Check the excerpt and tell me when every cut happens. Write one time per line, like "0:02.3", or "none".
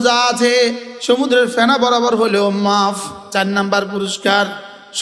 0:03.2